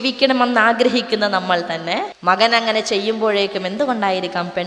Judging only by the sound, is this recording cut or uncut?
cut